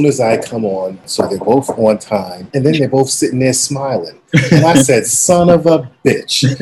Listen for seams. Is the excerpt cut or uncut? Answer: cut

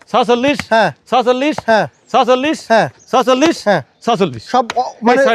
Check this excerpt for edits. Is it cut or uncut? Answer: uncut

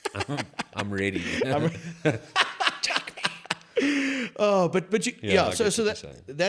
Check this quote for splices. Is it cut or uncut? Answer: uncut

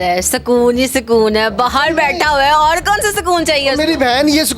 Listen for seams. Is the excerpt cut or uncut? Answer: uncut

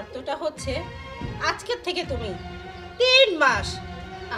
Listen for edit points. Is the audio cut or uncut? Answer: uncut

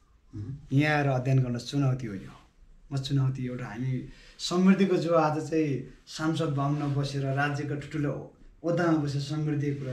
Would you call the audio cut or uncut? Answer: uncut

